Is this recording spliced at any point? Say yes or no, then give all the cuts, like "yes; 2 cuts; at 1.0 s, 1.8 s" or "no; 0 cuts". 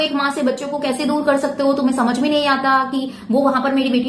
no; 0 cuts